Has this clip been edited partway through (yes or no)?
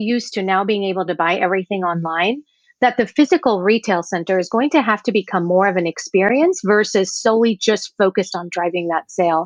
no